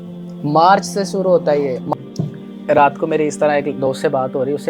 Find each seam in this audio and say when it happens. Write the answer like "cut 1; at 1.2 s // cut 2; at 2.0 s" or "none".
cut 1; at 1.9 s